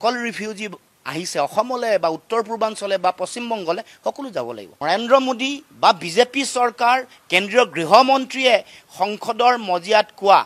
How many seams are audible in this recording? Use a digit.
1